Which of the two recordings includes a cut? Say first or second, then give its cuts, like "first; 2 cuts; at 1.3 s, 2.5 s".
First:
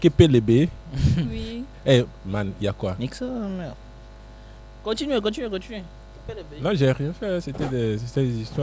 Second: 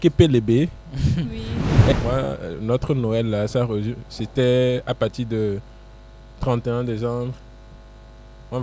second; 1 cut; at 1.9 s